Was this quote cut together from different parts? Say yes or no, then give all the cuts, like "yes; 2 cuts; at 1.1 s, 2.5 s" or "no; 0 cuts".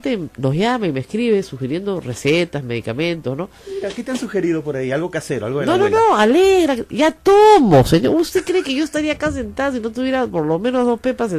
no; 0 cuts